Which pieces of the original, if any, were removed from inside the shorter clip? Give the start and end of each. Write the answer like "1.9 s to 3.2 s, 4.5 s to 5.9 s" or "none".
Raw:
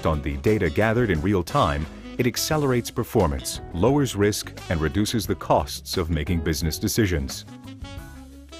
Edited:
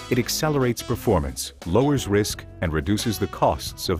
none